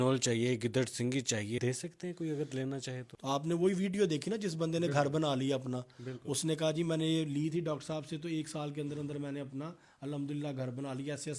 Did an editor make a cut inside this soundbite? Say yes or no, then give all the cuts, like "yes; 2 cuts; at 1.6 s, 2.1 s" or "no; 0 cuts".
yes; 2 cuts; at 1.6 s, 3.1 s